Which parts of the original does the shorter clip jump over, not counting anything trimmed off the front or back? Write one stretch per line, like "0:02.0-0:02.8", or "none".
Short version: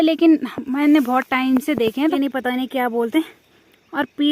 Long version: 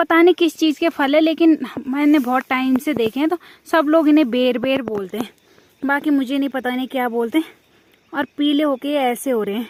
0:03.3-0:06.3